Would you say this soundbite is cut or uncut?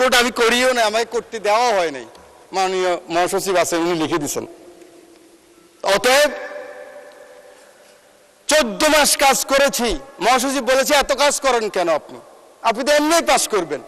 uncut